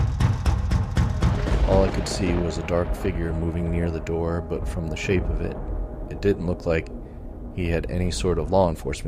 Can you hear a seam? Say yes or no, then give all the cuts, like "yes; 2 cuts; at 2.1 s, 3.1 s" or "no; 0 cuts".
yes; 1 cut; at 1.4 s